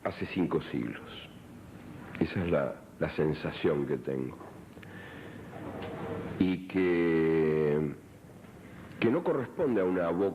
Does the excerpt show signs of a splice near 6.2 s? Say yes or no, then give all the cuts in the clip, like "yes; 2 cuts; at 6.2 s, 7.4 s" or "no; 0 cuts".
yes; 1 cut; at 6.2 s